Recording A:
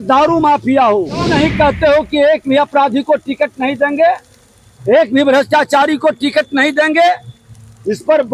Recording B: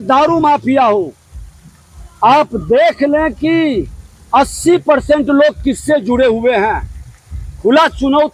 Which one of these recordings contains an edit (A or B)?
A